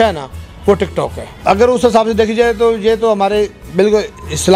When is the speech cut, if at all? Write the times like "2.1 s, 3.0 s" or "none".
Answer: 1.3 s